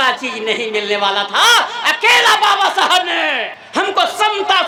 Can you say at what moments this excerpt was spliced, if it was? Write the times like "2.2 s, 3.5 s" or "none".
none

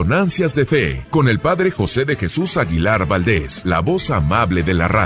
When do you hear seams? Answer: 1.0 s, 3.5 s

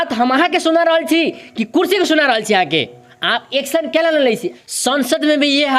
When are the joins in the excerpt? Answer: 4.5 s

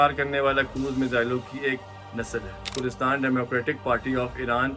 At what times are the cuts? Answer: 2.7 s

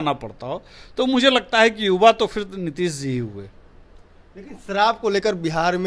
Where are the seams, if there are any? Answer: none

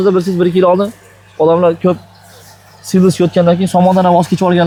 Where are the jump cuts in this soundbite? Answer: none

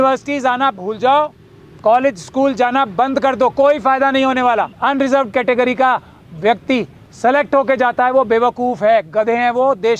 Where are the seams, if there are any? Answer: 4.7 s

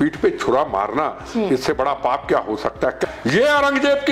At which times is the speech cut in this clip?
3.0 s

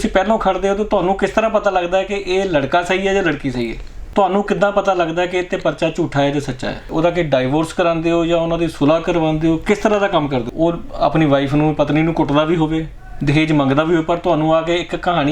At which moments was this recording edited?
4.0 s, 6.9 s, 10.5 s

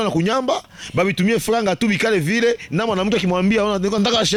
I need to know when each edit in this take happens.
none

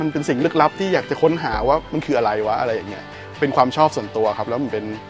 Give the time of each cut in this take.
none

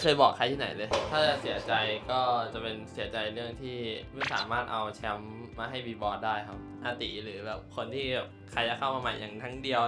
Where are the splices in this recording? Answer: 1.2 s, 6.6 s

